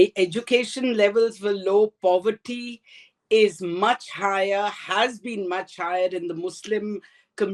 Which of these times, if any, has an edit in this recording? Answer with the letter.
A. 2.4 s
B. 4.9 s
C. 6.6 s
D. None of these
D